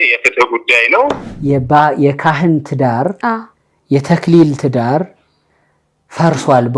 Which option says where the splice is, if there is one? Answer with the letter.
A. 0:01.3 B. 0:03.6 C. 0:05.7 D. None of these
A